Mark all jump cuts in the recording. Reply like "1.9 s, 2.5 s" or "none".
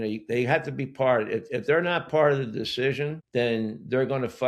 3.2 s